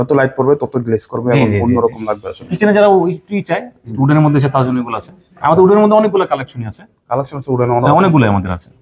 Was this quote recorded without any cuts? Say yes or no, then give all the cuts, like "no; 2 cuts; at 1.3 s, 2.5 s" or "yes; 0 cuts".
no; 1 cut; at 2.5 s